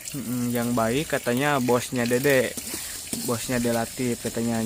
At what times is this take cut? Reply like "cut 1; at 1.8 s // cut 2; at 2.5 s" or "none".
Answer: none

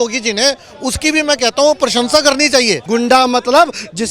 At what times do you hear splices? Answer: cut 1; at 2.8 s

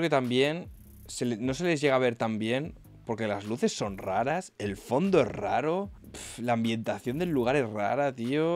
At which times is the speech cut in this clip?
none

